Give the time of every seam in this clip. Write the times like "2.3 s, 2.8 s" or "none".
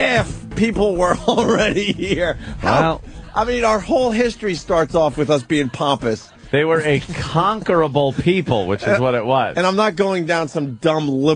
8.5 s